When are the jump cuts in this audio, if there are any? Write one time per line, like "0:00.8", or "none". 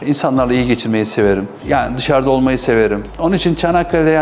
0:03.1